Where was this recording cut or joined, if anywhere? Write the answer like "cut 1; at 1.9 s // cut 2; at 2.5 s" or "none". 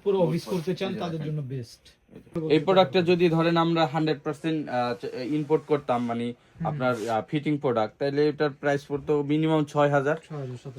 cut 1; at 2.3 s